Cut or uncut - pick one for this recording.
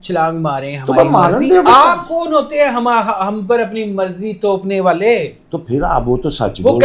uncut